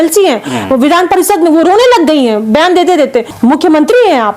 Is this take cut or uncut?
cut